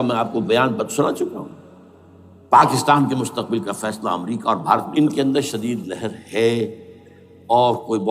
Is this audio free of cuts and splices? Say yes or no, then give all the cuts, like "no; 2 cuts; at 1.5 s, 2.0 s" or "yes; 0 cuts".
no; 1 cut; at 4.9 s